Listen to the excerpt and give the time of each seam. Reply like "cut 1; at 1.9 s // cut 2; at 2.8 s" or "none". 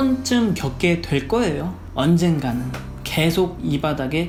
none